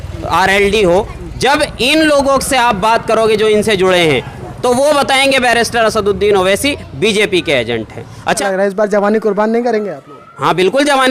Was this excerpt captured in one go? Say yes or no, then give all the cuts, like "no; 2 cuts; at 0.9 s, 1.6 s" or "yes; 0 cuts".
no; 1 cut; at 8.4 s